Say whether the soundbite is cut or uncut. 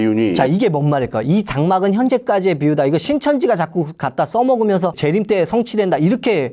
uncut